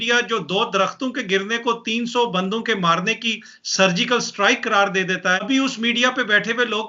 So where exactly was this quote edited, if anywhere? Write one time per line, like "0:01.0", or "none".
0:05.4